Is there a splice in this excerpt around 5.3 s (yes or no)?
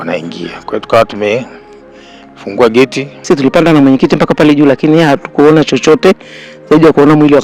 no